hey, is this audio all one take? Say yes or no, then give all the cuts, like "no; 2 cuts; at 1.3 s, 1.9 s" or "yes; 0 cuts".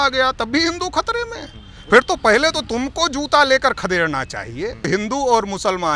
no; 1 cut; at 4.9 s